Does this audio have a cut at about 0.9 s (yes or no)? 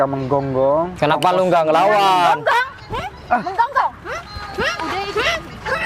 yes